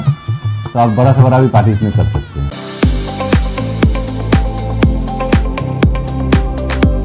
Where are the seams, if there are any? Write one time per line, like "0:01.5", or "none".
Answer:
0:02.5